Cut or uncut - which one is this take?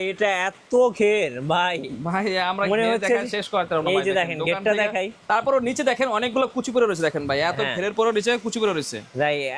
uncut